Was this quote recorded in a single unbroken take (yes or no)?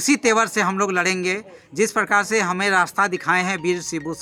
yes